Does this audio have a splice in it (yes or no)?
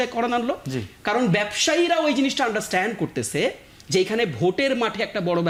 no